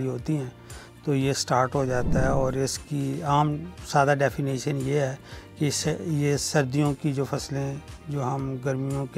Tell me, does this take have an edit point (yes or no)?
no